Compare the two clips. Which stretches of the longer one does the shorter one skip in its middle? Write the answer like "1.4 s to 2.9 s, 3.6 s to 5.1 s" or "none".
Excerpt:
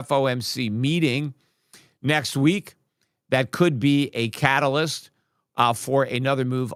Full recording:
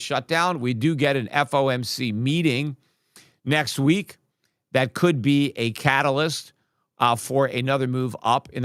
none